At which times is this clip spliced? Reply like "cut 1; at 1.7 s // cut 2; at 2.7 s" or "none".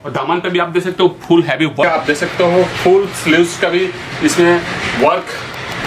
cut 1; at 1.8 s